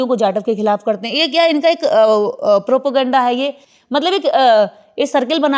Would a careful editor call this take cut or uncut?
uncut